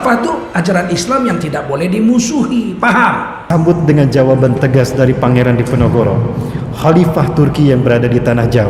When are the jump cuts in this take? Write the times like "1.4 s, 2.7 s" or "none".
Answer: 3.5 s